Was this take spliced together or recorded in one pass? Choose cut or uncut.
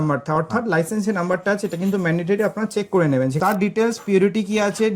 cut